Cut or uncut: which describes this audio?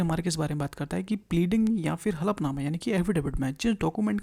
uncut